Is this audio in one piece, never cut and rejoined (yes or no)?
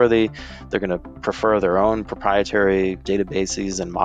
no